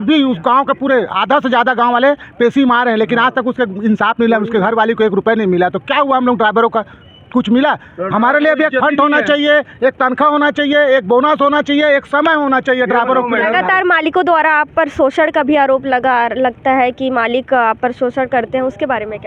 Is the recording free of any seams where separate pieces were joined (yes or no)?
yes